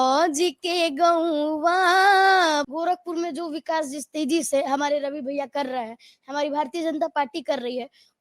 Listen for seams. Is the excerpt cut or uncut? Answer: cut